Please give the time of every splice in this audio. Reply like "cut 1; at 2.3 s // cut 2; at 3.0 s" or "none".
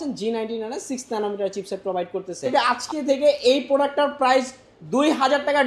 cut 1; at 2.5 s